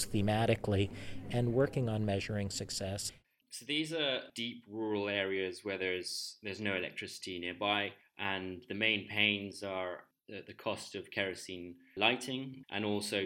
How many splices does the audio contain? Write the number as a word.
one